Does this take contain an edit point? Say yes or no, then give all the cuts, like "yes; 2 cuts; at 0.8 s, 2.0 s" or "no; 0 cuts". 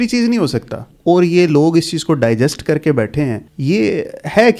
yes; 2 cuts; at 0.9 s, 3.5 s